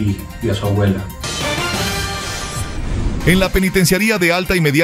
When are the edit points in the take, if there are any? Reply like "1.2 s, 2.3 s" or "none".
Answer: 1.2 s